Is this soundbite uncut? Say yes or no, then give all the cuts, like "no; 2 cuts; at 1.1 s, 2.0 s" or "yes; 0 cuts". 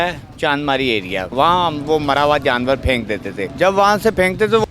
no; 2 cuts; at 1.3 s, 3.4 s